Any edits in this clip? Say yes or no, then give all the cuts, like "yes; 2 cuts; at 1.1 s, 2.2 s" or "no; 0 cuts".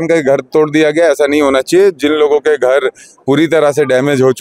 no; 0 cuts